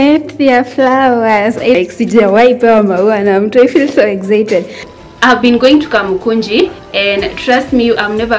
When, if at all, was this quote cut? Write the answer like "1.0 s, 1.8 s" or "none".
4.9 s